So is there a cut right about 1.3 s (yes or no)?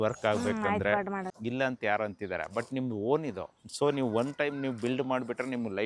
yes